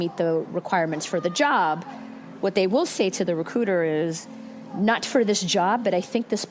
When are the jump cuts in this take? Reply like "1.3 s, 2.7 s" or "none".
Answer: none